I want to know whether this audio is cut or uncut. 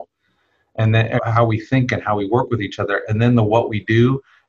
cut